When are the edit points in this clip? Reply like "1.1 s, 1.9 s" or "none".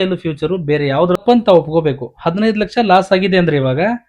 1.2 s